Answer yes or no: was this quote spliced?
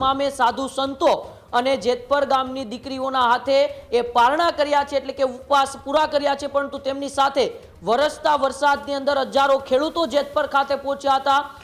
no